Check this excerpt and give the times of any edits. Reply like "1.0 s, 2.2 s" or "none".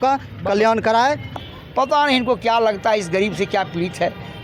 1.4 s